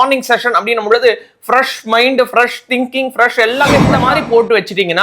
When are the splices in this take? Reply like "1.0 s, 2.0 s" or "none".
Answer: 3.9 s